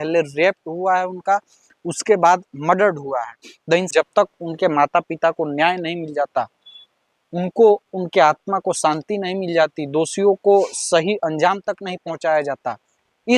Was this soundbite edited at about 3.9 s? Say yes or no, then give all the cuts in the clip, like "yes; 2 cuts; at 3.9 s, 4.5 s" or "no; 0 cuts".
yes; 1 cut; at 3.9 s